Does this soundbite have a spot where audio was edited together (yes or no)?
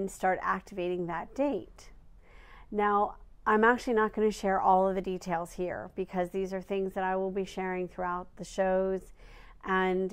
yes